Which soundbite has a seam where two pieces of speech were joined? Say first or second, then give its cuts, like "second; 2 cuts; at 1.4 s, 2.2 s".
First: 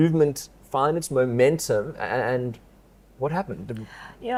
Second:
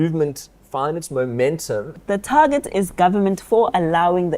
second; 1 cut; at 2.0 s